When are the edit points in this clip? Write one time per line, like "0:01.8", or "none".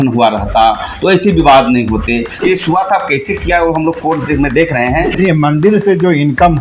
0:02.4
0:05.1

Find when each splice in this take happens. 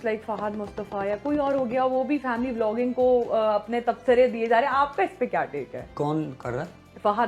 none

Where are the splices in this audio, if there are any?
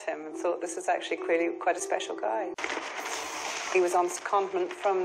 0:02.5

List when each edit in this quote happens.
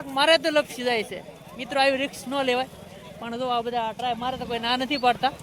none

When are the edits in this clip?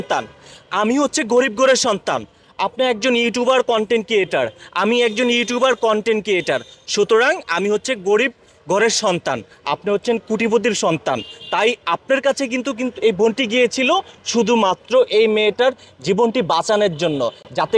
none

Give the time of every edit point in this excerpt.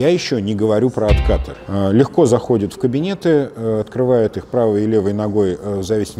0:01.6

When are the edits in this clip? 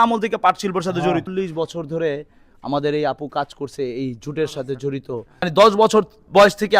0:01.3
0:05.5

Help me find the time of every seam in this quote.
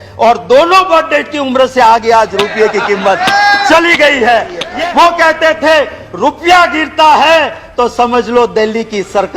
0:04.6

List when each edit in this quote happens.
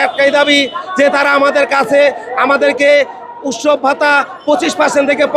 none

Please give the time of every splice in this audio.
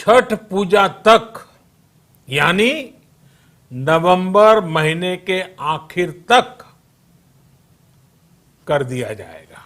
none

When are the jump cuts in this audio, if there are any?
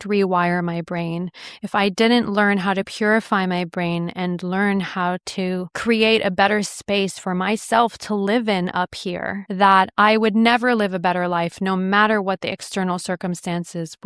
none

